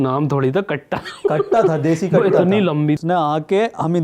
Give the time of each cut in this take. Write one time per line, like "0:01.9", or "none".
0:03.0